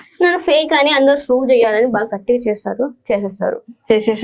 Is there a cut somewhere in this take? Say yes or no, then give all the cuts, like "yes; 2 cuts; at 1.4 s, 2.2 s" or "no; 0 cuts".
no; 0 cuts